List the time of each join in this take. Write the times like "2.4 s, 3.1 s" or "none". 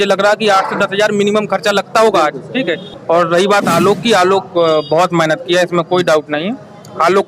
2.9 s